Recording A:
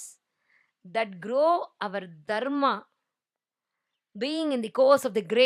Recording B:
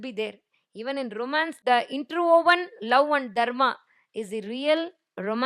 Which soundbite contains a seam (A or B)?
B